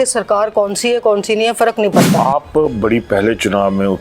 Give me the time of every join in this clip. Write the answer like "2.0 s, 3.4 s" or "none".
none

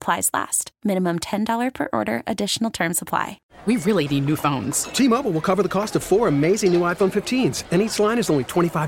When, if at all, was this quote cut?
3.5 s

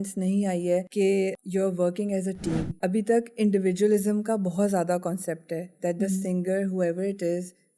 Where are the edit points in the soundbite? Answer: 1.2 s, 2.7 s

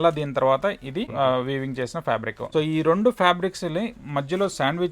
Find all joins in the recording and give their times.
1.1 s, 2.4 s

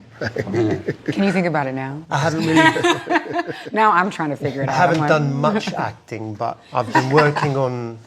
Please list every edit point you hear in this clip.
1.1 s

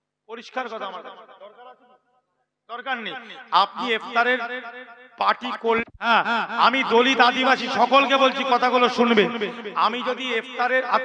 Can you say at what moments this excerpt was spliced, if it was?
6.1 s

